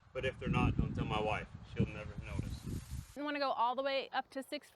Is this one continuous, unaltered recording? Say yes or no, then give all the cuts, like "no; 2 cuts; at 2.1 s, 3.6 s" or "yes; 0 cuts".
no; 1 cut; at 3.2 s